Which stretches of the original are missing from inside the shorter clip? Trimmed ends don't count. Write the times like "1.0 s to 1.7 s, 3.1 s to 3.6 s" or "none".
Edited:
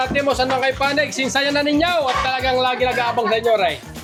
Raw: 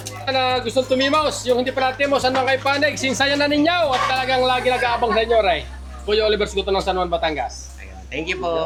none